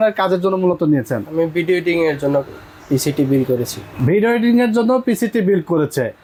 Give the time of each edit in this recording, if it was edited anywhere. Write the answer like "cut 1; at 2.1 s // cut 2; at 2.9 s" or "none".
none